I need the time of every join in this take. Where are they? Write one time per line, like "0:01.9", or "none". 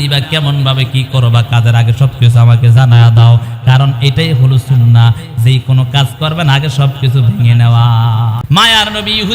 0:08.4